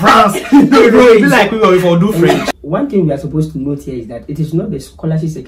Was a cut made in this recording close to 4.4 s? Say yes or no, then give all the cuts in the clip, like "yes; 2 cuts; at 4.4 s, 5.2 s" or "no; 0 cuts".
no; 1 cut; at 2.3 s